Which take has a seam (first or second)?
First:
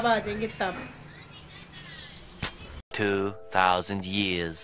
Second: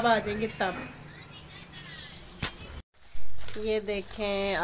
second